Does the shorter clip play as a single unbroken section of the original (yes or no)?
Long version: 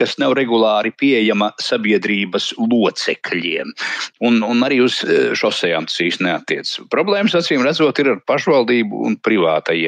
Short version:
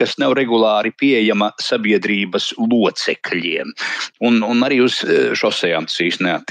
yes